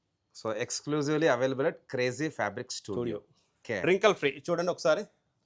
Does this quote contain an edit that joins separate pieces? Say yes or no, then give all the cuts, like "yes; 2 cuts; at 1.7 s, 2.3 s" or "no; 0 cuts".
yes; 1 cut; at 3.6 s